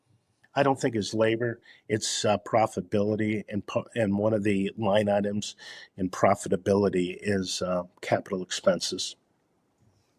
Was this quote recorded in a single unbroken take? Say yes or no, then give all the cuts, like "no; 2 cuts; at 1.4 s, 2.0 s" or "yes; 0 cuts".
yes; 0 cuts